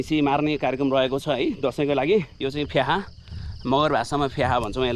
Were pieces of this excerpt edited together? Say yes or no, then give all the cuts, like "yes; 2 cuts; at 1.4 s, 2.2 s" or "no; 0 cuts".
yes; 1 cut; at 2.3 s